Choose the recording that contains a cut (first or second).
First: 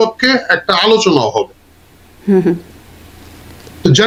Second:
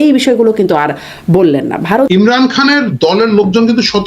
second